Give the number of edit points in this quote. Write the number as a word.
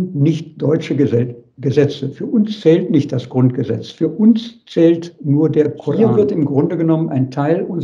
one